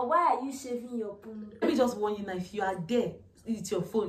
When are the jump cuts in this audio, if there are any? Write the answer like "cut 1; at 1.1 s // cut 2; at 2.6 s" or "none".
cut 1; at 1.6 s